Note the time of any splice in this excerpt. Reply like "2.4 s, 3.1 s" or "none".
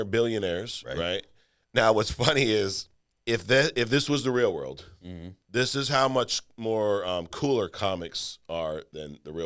none